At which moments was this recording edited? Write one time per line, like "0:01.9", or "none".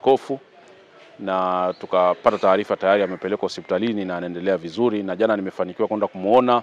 none